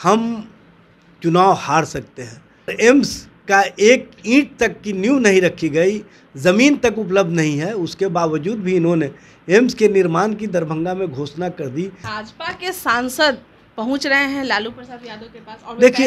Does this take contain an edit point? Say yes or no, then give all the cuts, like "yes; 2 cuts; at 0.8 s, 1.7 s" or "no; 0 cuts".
yes; 2 cuts; at 2.7 s, 12.2 s